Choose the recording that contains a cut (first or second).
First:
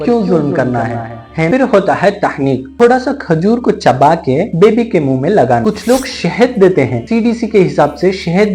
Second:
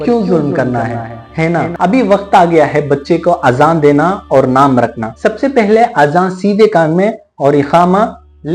first